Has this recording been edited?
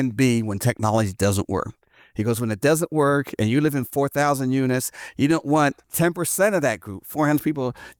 no; 0 cuts

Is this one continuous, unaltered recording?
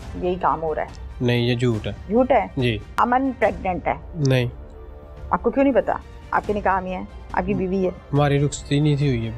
no; 3 cuts; at 1.9 s, 2.9 s, 4.1 s

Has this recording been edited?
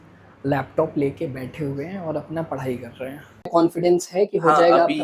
yes; 1 cut; at 3.3 s

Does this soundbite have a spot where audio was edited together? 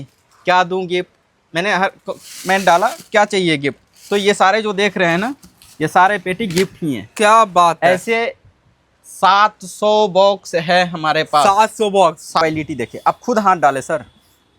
yes; 1 cut; at 12.4 s

